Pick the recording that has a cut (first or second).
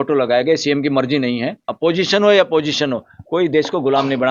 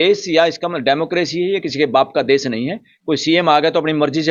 first